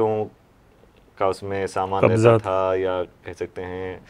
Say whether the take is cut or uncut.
uncut